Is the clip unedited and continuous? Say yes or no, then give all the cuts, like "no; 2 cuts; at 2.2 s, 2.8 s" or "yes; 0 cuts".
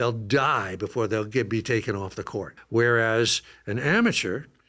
no; 1 cut; at 2.6 s